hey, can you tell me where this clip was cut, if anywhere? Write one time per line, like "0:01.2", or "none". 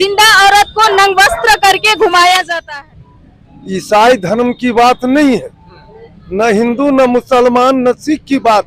0:02.6